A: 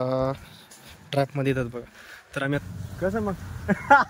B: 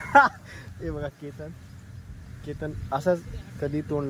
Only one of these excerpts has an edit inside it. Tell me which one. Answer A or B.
A